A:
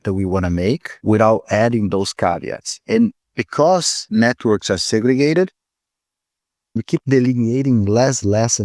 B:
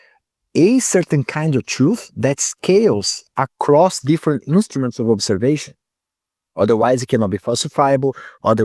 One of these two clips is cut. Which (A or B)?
A